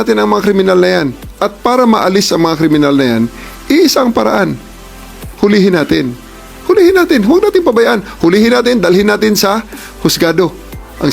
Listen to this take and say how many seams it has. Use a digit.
0